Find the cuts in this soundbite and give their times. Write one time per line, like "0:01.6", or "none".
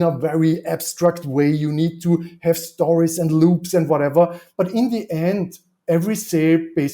0:04.4

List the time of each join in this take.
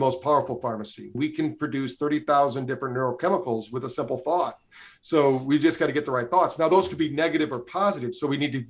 0:01.1

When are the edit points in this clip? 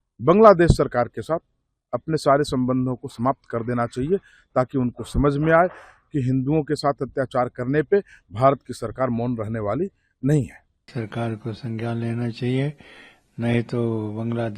0:10.9

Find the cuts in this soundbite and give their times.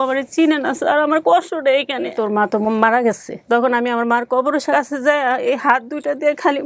0:02.1
0:04.7

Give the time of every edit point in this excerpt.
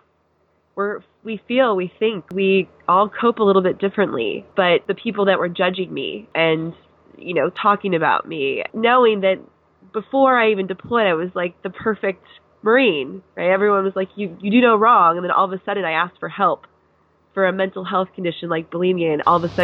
0:02.3
0:04.8
0:06.2
0:08.7

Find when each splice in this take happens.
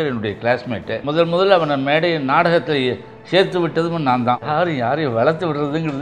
0:01.0
0:04.5

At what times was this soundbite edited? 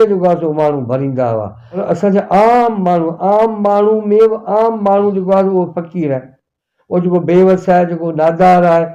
0:01.8

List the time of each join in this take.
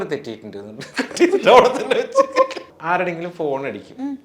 0:02.6

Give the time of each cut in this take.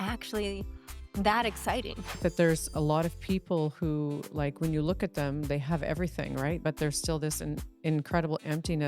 0:02.1
0:06.6

